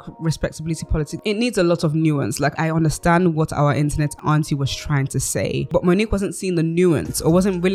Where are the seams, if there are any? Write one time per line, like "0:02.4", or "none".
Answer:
0:01.1
0:02.5
0:04.2
0:05.7